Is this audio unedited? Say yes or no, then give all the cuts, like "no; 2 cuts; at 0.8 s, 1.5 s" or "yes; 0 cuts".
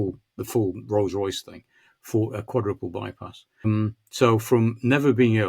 no; 1 cut; at 3.6 s